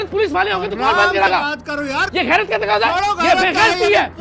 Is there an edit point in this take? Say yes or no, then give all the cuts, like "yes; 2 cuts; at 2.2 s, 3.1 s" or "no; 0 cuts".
yes; 1 cut; at 1.3 s